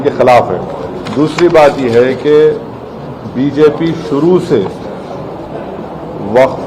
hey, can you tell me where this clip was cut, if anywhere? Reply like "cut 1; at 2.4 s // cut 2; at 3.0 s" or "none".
cut 1; at 1.0 s